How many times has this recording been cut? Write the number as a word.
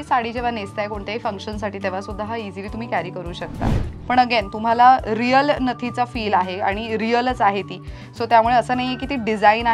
one